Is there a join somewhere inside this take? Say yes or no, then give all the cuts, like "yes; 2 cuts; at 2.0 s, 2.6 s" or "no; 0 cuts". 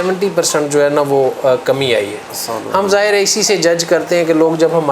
no; 0 cuts